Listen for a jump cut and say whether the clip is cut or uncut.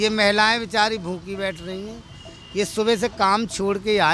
uncut